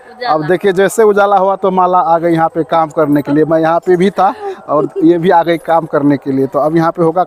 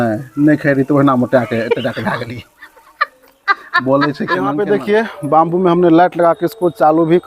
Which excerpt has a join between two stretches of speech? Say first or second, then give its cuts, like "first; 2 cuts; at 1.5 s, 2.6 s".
second; 1 cut; at 4.3 s